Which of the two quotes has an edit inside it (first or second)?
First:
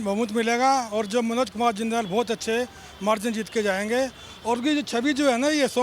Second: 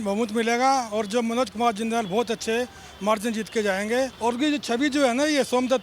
second